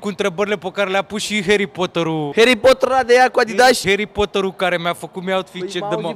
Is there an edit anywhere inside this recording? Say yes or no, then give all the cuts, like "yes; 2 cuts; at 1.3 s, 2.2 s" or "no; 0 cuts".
no; 0 cuts